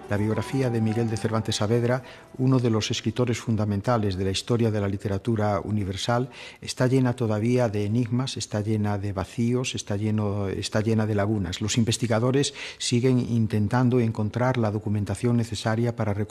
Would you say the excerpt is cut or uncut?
cut